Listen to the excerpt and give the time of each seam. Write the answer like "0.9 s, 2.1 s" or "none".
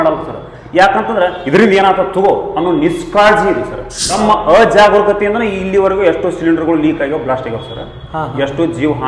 4.1 s